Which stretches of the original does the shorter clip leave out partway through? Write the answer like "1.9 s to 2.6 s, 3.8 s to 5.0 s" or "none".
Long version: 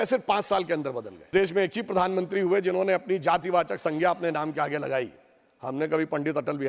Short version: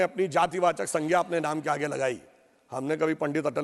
none